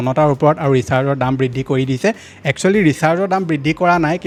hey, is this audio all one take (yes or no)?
yes